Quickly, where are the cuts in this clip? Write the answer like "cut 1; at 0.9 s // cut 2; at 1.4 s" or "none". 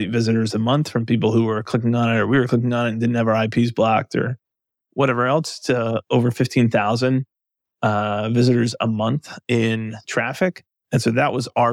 cut 1; at 10.7 s